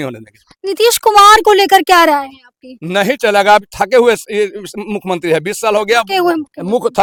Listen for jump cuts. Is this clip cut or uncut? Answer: uncut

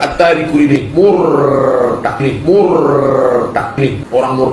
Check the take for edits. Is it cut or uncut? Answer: uncut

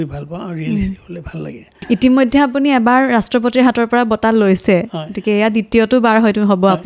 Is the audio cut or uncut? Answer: cut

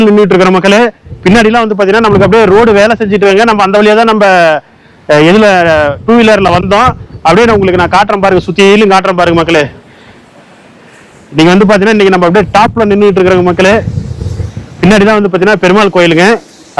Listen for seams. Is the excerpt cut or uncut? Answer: uncut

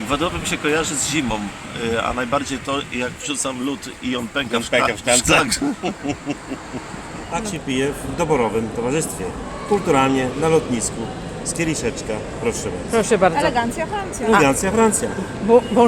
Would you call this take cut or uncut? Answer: cut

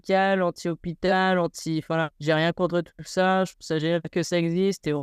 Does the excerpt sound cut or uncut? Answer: cut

